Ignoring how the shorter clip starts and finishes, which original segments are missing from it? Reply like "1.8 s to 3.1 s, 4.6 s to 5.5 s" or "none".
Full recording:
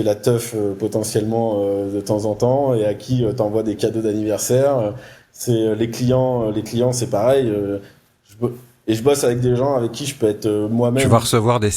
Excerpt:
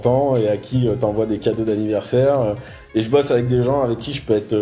5.1 s to 8.7 s